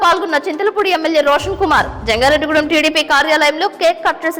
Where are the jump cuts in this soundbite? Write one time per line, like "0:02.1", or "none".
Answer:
none